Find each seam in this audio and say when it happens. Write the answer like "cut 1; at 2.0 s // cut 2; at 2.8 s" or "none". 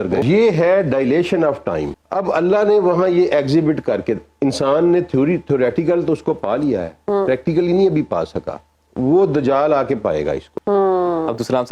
cut 1; at 2.0 s // cut 2; at 10.5 s